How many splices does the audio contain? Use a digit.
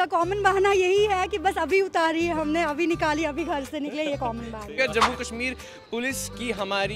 1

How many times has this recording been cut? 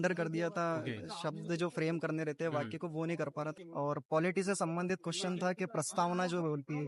1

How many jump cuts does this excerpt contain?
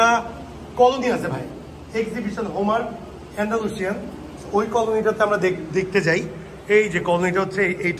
0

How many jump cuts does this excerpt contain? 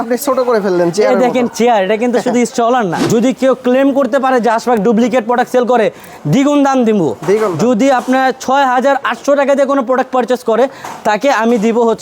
1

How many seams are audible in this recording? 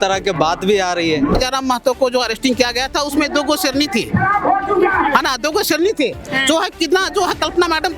1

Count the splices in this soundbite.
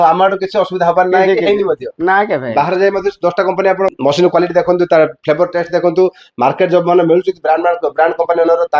2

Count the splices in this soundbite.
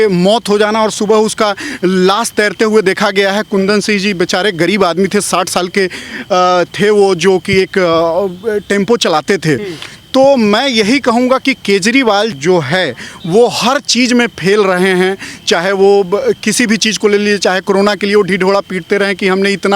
0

